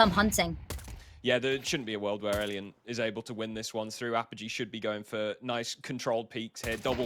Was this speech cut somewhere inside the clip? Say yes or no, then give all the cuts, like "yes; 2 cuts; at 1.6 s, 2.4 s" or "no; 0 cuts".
no; 0 cuts